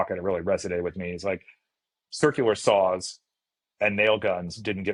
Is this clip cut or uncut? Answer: uncut